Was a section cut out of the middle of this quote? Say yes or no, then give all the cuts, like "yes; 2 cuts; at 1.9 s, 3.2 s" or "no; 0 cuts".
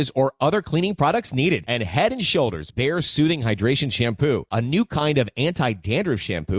no; 0 cuts